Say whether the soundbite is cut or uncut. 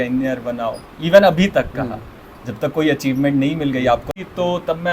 cut